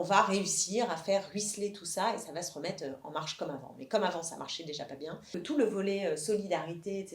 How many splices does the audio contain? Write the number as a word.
one